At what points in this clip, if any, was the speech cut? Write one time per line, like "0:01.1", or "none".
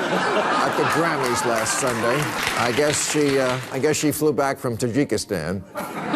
0:02.3